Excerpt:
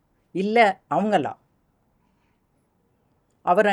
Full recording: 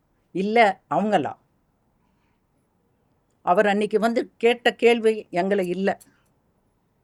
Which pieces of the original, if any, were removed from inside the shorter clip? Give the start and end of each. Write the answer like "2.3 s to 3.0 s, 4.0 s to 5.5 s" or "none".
none